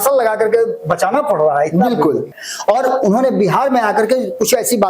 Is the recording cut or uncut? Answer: cut